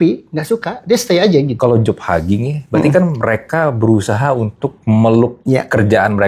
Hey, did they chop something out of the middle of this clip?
yes; 3 cuts; at 1.5 s, 4.7 s, 5.4 s

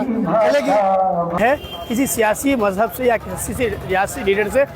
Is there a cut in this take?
yes; 1 cut; at 1.4 s

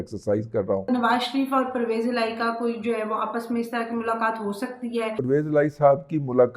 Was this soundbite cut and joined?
yes; 2 cuts; at 0.9 s, 5.2 s

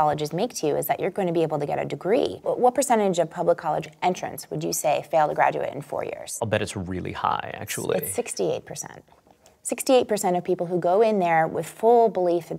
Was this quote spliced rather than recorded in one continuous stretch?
yes; 3 cuts; at 2.4 s, 3.9 s, 6.3 s

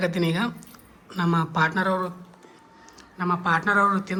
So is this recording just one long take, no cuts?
yes; 0 cuts

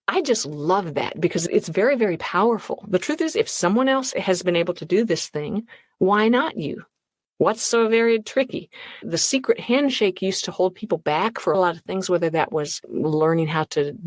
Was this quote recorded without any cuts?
no; 4 cuts; at 1.4 s, 4.1 s, 9.0 s, 11.5 s

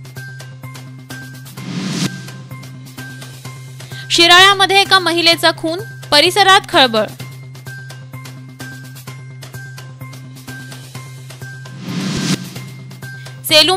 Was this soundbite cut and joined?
yes; 1 cut; at 12.2 s

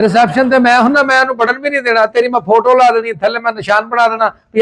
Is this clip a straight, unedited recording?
yes; 0 cuts

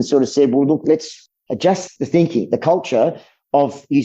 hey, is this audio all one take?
no; 1 cut; at 1.9 s

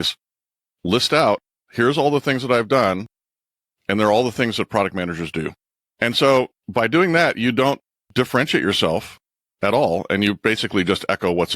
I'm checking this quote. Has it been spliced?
yes; 1 cut; at 6.2 s

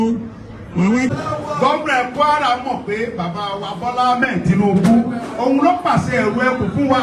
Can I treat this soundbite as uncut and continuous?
no; 1 cut; at 1.1 s

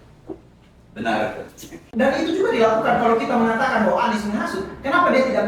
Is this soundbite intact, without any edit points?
no; 1 cut; at 1.7 s

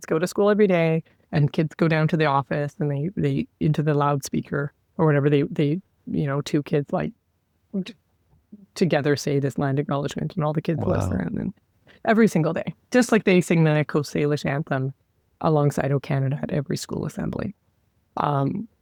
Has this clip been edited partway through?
no; 0 cuts

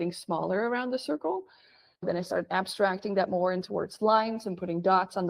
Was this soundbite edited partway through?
no; 0 cuts

